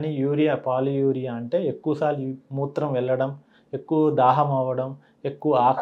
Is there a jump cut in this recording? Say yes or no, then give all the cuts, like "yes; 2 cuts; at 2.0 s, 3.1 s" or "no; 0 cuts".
no; 0 cuts